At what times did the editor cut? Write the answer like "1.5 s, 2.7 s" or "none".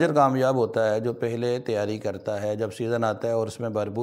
none